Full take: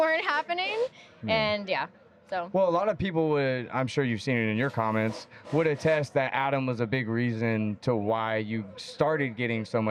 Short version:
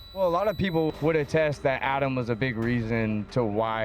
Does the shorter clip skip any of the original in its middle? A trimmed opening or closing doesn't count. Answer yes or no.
yes